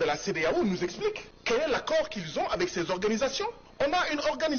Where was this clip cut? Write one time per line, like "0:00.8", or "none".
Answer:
0:01.3
0:03.6